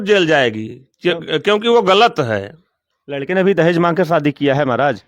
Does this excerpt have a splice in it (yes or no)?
no